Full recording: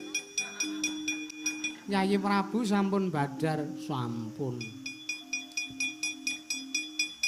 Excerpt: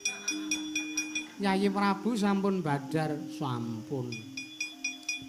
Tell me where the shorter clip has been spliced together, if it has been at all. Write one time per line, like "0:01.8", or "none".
0:00.9